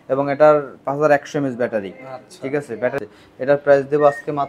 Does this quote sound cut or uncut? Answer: cut